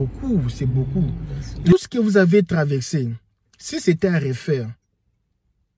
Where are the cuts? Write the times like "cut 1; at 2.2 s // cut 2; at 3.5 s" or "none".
cut 1; at 1.7 s

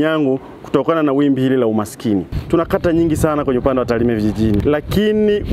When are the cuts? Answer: cut 1; at 2.3 s // cut 2; at 4.6 s

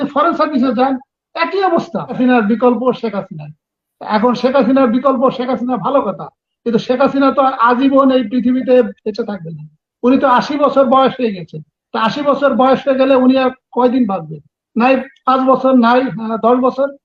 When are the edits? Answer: cut 1; at 2.1 s

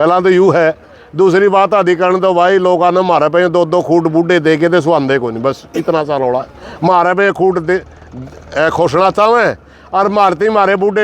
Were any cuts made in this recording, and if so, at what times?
none

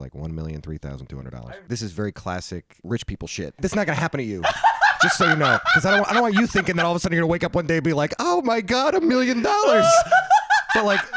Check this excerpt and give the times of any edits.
cut 1; at 1.4 s // cut 2; at 2.7 s // cut 3; at 3.6 s

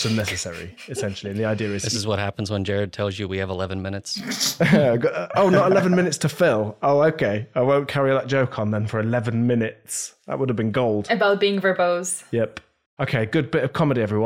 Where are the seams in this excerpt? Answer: none

